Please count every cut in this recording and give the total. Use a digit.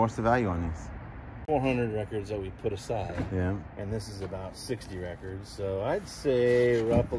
1